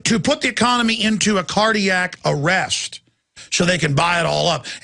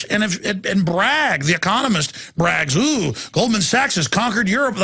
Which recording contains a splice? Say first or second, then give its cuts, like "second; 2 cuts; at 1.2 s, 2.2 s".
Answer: second; 1 cut; at 1.3 s